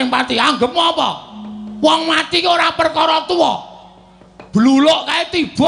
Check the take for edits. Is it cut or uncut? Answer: uncut